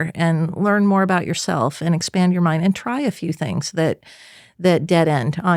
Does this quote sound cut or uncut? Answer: uncut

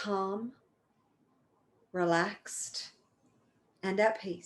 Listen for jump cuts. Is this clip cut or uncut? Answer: uncut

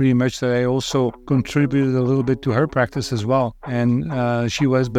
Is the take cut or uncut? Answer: cut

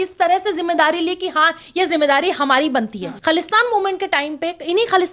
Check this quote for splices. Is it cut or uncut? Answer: cut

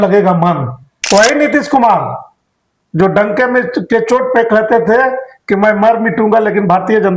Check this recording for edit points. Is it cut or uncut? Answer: cut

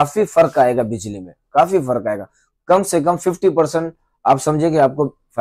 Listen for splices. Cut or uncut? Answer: uncut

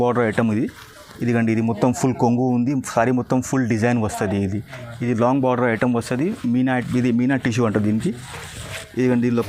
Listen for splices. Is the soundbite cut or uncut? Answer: uncut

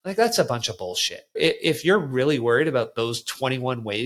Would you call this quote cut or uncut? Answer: cut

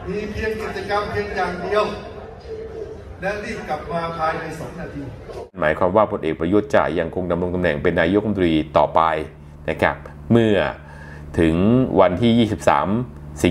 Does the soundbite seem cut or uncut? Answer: cut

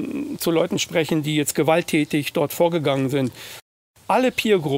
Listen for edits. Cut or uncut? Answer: cut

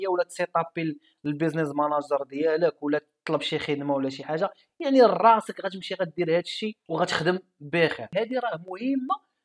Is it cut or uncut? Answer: cut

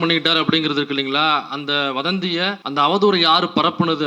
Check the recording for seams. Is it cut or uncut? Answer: cut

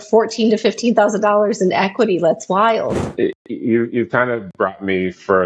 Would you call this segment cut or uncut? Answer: cut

